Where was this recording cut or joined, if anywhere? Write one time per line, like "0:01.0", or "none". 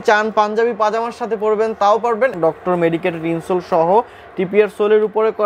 0:02.3

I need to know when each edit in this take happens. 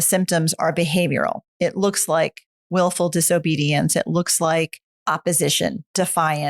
0:01.5
0:05.0

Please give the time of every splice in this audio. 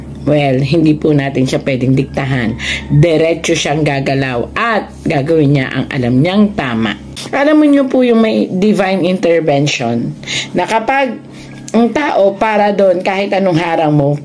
0:07.2

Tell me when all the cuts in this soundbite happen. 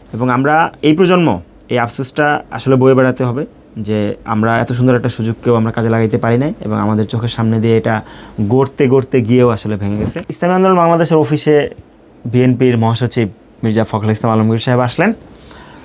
0:10.2

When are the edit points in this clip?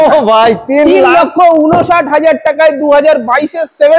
none

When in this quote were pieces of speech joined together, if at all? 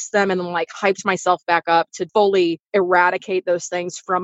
0:02.0
0:02.6

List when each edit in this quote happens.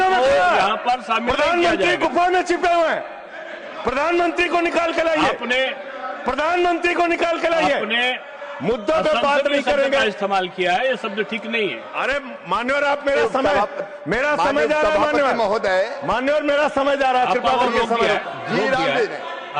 none

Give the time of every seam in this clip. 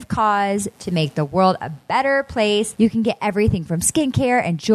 0:02.7

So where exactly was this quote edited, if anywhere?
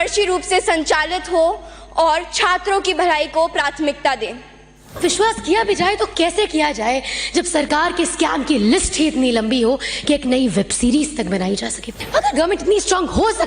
0:05.0
0:12.0

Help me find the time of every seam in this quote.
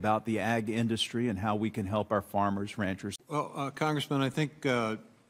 none

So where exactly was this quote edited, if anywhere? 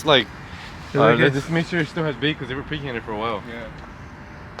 none

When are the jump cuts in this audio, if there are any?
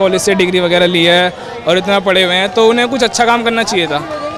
none

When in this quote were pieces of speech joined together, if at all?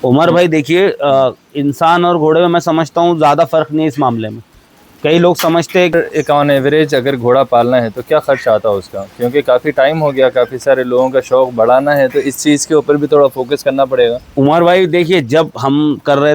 0:05.9

